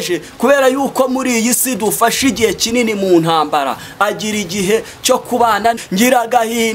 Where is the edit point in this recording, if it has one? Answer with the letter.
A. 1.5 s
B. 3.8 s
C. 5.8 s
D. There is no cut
C